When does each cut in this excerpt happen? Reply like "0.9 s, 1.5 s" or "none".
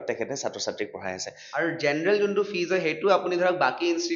1.4 s